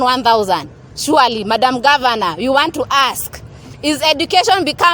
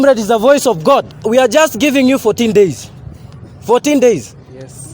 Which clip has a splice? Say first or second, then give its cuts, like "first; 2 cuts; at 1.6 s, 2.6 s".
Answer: second; 1 cut; at 1.1 s